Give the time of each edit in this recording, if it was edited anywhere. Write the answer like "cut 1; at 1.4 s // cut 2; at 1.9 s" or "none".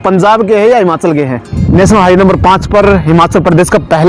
cut 1; at 1.5 s

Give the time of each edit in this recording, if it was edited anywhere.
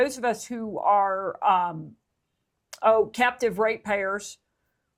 none

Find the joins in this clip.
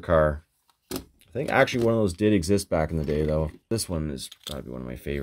cut 1; at 3.7 s

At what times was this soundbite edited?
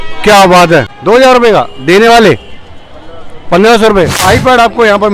cut 1; at 0.9 s // cut 2; at 4.2 s

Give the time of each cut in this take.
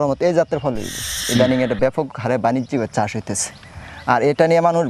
cut 1; at 1.2 s

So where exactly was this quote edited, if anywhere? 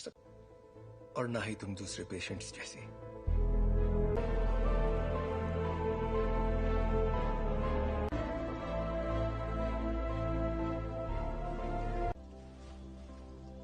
cut 1; at 4.2 s

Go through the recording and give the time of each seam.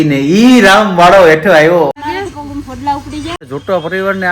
cut 1; at 1.9 s // cut 2; at 3.4 s

